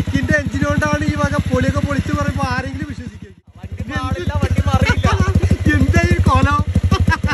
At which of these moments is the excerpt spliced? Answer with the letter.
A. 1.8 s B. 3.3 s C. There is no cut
B